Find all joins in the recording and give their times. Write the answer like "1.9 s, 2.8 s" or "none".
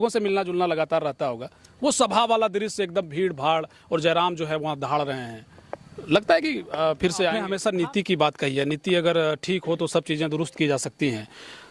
7.5 s